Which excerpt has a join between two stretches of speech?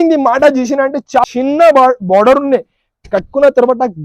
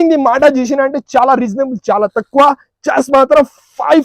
first; 1 cut; at 1.2 s

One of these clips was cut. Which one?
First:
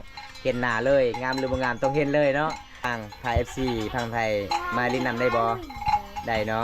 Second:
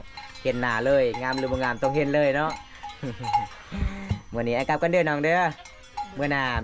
first; 1 cut; at 2.9 s

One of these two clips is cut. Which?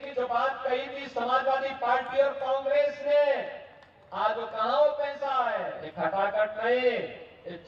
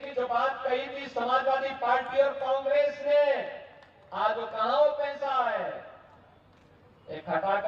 first; 1 cut; at 5.8 s

